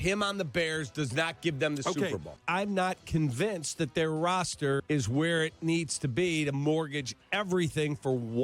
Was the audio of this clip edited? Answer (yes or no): yes